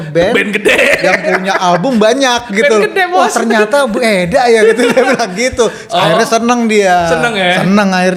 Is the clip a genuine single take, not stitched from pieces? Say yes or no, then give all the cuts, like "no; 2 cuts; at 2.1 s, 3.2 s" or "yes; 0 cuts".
yes; 0 cuts